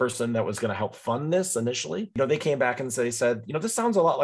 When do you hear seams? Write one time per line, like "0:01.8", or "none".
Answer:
0:02.1